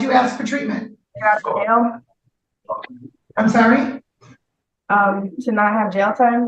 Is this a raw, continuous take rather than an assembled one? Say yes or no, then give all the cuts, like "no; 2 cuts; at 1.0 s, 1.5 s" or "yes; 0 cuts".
no; 1 cut; at 1.1 s